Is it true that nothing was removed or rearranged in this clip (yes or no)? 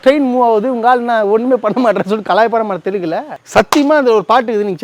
no